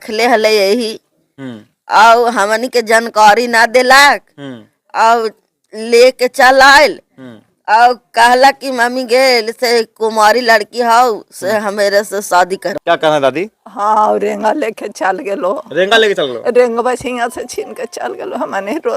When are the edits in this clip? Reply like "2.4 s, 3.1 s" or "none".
12.7 s